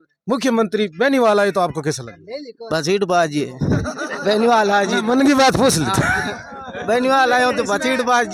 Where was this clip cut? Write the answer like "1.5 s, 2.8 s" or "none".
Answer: none